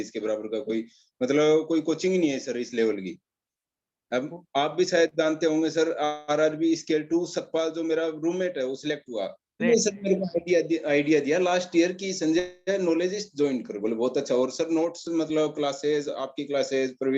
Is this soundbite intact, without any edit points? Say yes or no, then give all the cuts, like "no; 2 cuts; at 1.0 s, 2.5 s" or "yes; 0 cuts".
no; 1 cut; at 9.6 s